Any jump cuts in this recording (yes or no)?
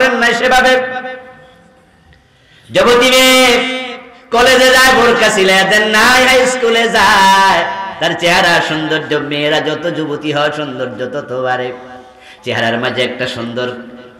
no